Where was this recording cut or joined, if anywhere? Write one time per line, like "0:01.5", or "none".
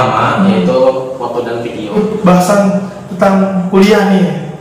0:01.9